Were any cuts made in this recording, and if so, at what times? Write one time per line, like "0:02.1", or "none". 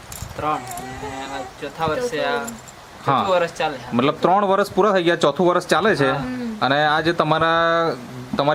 none